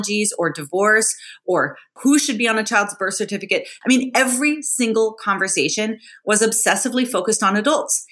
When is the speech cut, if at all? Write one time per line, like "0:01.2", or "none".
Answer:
0:01.9
0:03.7

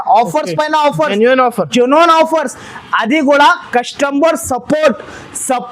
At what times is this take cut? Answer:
none

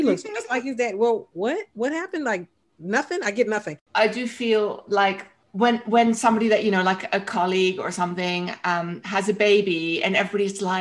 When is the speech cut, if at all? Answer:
0:03.8

